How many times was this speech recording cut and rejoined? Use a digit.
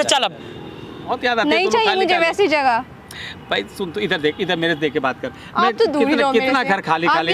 1